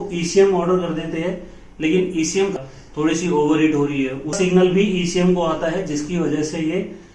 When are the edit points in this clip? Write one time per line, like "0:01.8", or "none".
0:02.6
0:04.3